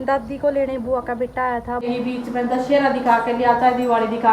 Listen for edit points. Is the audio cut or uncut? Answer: cut